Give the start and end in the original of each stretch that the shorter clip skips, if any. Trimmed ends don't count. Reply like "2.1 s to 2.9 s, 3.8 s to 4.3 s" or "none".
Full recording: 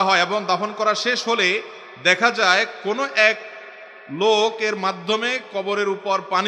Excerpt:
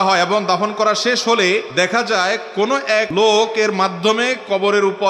1.7 s to 2.0 s, 3.4 s to 4.1 s